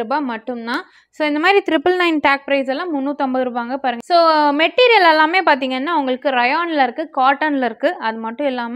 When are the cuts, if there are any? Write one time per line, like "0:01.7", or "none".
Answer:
0:04.0